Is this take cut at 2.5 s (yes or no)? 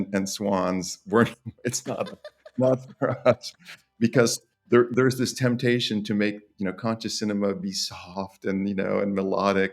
no